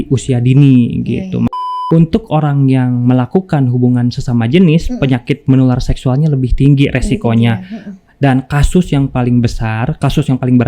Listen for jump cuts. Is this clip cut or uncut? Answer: cut